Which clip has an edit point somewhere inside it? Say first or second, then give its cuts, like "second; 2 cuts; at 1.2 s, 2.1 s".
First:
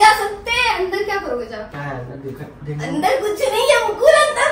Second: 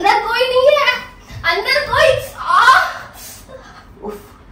first; 1 cut; at 1.7 s